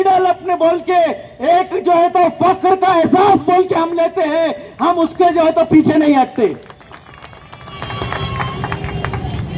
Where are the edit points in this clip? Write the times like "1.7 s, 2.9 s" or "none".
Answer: none